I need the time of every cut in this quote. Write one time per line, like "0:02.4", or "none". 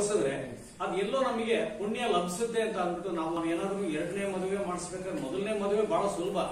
0:03.4